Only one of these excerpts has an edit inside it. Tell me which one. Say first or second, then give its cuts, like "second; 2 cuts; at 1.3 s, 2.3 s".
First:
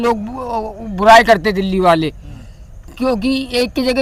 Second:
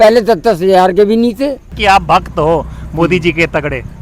second; 1 cut; at 1.7 s